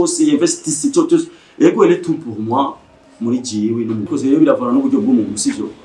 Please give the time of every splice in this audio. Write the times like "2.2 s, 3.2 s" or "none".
4.1 s